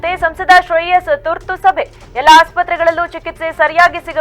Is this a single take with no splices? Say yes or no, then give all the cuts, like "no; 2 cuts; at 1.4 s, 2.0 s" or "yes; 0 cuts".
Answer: yes; 0 cuts